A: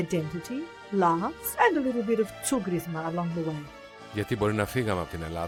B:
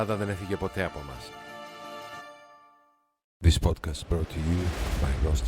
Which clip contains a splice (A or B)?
B